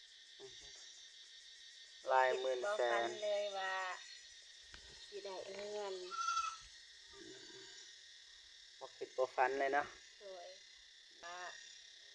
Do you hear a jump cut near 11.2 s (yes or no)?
yes